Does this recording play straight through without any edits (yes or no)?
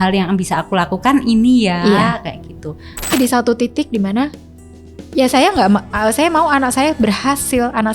no